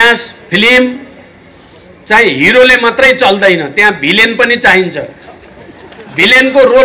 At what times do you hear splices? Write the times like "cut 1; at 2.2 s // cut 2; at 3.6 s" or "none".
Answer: none